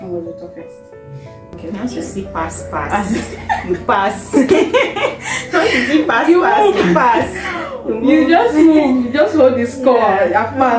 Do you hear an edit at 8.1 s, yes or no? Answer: no